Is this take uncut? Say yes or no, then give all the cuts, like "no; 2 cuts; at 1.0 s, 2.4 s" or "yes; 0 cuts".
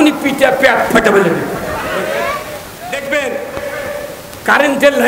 no; 1 cut; at 2.9 s